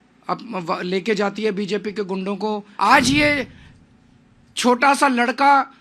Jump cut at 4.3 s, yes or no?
no